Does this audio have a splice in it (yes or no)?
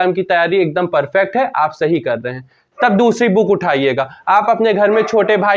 no